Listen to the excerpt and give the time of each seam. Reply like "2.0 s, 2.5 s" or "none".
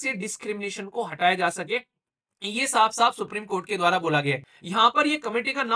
4.5 s

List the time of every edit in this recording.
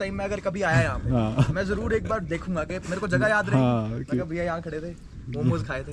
none

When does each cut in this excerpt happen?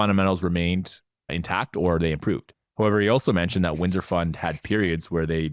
1.3 s, 2.6 s

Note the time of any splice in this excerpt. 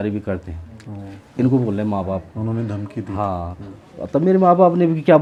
none

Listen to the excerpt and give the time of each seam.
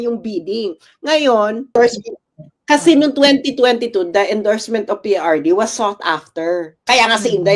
1.7 s

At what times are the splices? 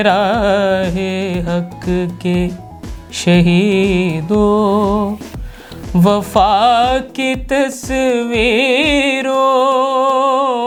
none

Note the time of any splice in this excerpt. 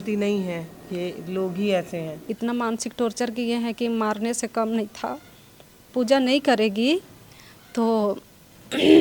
2.2 s, 5.9 s

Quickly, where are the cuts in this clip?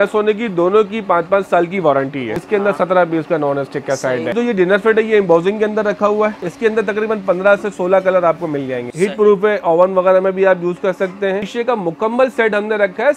2.4 s, 4.3 s, 6.4 s, 8.9 s, 11.5 s

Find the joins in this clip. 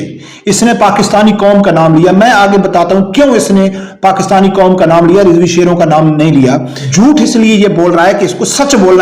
6.8 s

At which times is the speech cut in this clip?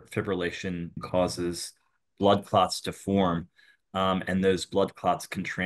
1.0 s

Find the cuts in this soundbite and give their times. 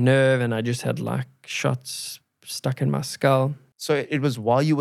3.7 s

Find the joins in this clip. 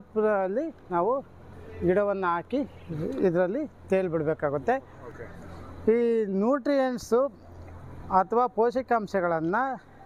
none

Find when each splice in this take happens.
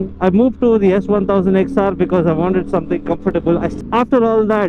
3.7 s

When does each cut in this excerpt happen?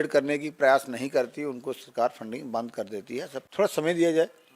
3.4 s

